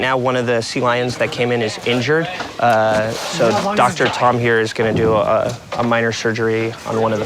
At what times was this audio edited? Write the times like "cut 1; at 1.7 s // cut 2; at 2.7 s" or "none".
none